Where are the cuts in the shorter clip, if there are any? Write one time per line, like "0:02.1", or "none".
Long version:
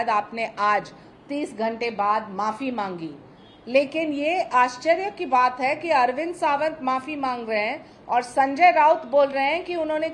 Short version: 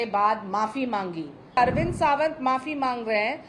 0:01.6